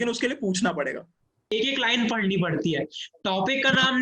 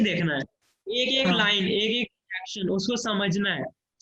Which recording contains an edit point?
first; 1 cut; at 1.5 s

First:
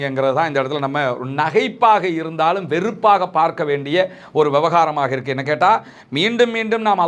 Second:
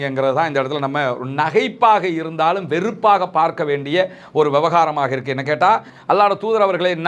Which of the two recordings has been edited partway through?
second; 1 cut; at 5.9 s

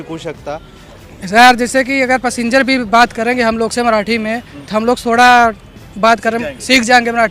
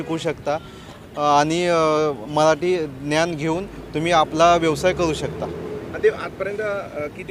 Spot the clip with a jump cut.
first; 1 cut; at 1.0 s

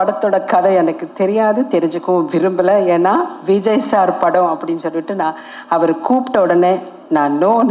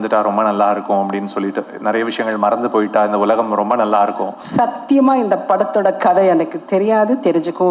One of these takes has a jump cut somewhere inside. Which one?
second; 1 cut; at 4.3 s

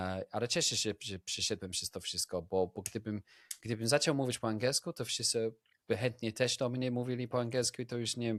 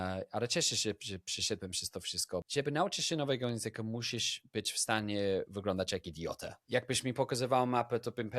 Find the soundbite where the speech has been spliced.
second; 2 cuts; at 2.5 s, 6.5 s

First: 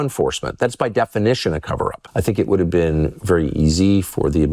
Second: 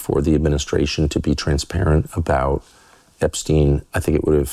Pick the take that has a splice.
first; 1 cut; at 2.0 s

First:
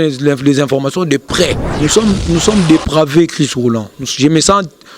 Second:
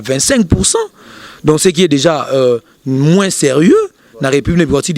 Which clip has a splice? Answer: first; 1 cut; at 1.6 s

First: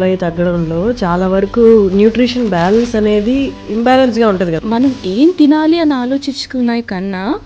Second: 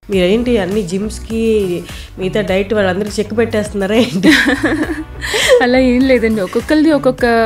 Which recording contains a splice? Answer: first; 2 cuts; at 3.6 s, 4.6 s

